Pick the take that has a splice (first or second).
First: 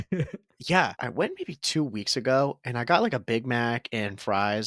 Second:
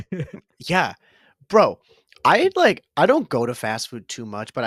first